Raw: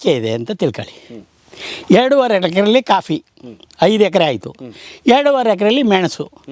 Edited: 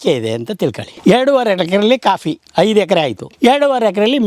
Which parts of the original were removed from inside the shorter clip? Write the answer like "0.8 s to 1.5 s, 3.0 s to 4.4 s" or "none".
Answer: 0.9 s to 1.7 s, 3.2 s to 3.6 s, 4.5 s to 4.9 s